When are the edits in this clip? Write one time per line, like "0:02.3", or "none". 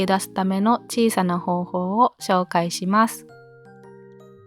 0:03.1